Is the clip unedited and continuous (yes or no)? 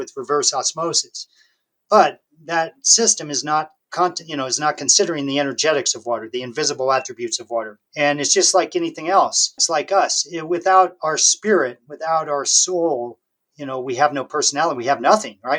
no